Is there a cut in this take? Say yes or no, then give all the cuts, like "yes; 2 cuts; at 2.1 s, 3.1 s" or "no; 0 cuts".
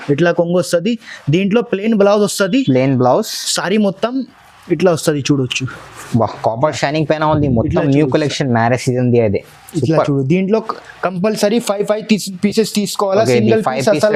no; 0 cuts